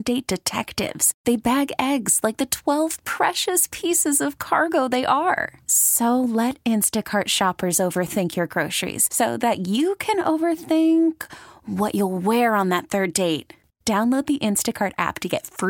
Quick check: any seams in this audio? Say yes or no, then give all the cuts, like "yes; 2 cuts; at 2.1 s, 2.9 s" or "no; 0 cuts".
no; 0 cuts